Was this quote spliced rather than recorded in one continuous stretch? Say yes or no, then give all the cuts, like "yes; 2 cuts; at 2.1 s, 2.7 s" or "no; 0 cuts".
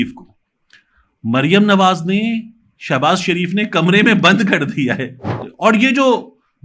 yes; 1 cut; at 5.4 s